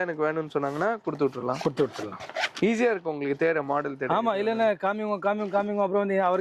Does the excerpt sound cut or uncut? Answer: uncut